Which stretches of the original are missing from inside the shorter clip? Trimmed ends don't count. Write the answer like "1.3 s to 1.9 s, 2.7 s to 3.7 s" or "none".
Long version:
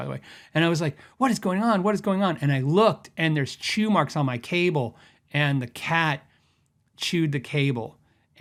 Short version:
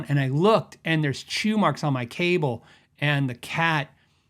none